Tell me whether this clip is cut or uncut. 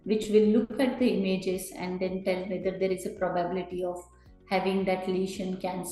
uncut